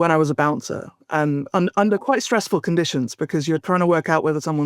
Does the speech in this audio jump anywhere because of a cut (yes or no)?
no